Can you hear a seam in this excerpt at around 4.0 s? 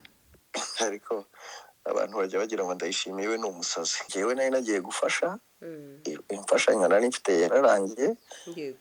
yes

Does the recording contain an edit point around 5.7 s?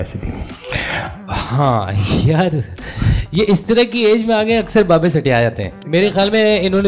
yes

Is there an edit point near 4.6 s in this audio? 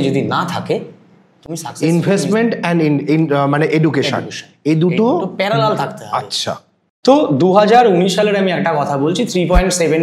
no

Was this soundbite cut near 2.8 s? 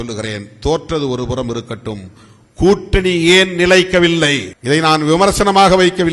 no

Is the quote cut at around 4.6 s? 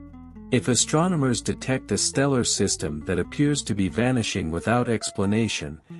no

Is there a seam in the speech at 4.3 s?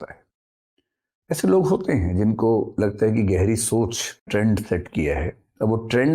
yes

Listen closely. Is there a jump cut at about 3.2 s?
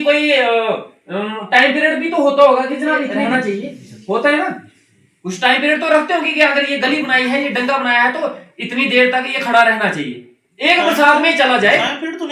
yes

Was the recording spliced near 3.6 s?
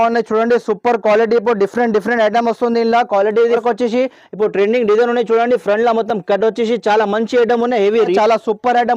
yes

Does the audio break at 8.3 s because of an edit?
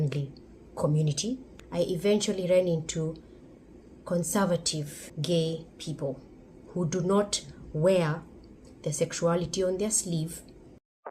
no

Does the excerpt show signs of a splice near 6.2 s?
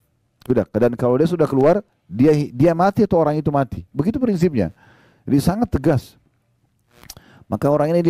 no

